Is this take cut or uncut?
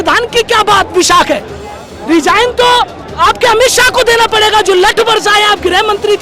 uncut